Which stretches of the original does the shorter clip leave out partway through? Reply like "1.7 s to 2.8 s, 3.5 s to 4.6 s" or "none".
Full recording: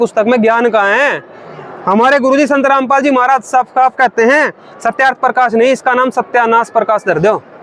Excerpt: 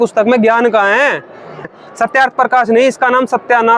1.7 s to 4.6 s